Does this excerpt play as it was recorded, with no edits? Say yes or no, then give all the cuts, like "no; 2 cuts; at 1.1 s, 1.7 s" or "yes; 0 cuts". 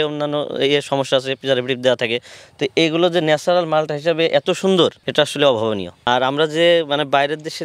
yes; 0 cuts